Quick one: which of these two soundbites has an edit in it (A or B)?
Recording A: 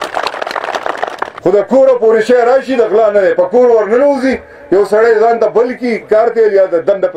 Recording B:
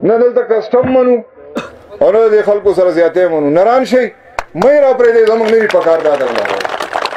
A